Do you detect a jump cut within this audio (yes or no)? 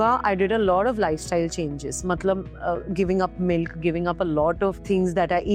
no